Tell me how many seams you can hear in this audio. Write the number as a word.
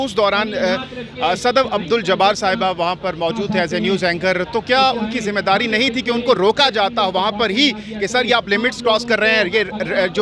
zero